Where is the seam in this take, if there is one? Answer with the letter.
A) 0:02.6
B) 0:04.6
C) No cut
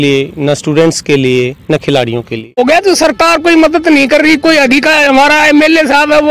A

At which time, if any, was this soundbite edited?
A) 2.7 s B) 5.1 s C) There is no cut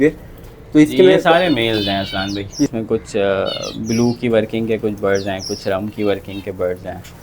A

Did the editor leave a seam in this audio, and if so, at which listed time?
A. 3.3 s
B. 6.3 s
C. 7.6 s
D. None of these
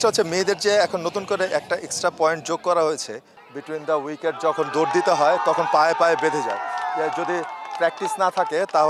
A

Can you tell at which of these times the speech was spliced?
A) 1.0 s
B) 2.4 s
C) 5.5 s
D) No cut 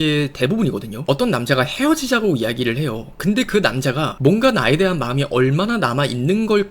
A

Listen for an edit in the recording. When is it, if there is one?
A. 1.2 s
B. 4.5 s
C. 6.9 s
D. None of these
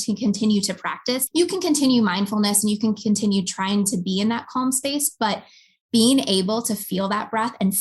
A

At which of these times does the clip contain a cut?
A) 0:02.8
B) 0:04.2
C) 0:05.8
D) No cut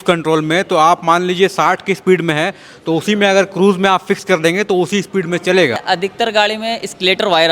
C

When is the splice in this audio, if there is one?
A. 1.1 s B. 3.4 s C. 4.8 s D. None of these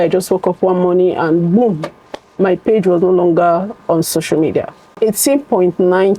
C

